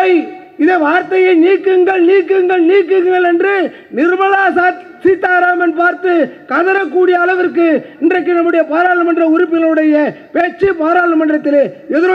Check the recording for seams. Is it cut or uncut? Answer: uncut